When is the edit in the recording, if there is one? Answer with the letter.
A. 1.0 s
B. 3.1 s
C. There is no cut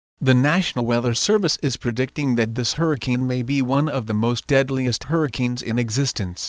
A